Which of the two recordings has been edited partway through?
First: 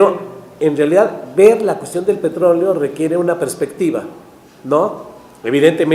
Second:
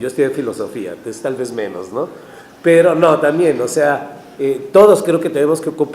second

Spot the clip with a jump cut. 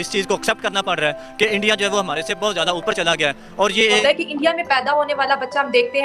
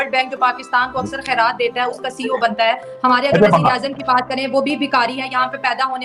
first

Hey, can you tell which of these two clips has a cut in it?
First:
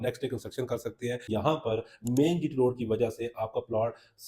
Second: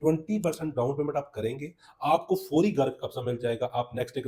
first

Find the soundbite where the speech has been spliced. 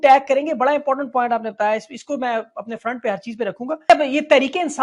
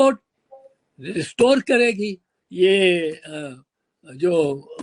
first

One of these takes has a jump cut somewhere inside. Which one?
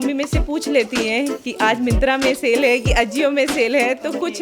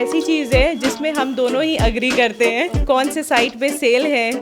second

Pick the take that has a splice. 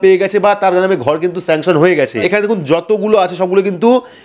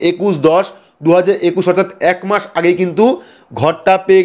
first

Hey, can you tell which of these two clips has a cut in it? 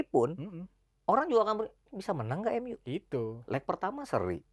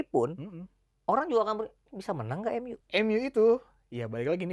second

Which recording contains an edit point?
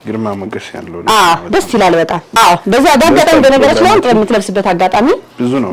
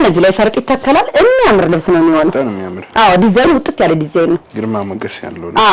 first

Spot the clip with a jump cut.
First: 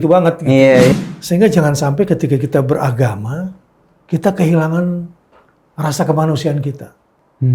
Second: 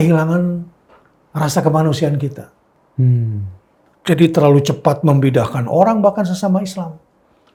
first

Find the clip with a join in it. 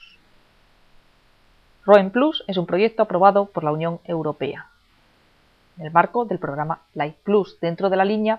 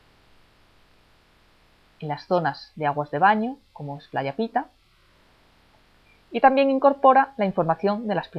second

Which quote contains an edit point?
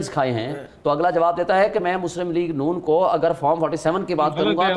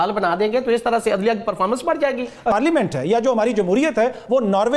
second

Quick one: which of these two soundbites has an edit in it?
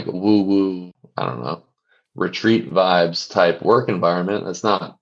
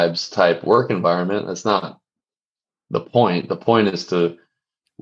first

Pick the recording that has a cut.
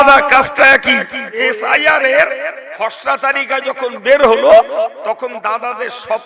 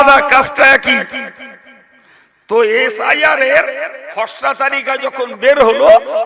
first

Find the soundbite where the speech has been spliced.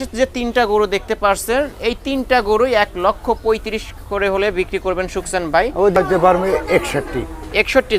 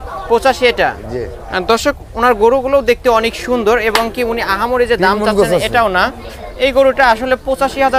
first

